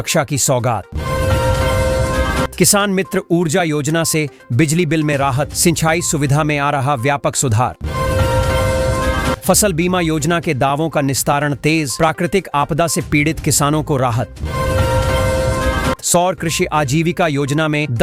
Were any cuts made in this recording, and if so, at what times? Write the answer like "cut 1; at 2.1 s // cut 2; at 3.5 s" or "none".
none